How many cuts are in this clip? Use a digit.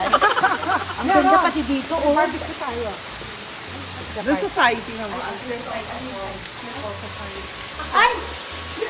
0